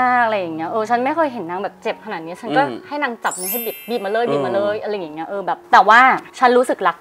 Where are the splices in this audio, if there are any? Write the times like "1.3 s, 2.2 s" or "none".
5.6 s